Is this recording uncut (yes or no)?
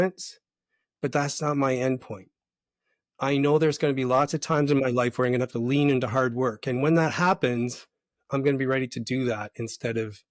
yes